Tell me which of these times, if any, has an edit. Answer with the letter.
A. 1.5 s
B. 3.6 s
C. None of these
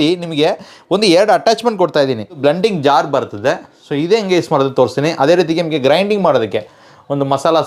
C